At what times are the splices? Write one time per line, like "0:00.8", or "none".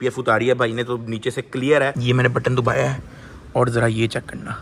0:01.9